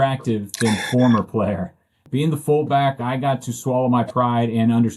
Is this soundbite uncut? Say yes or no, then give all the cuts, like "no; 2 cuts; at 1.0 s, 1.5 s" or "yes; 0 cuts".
no; 1 cut; at 1.9 s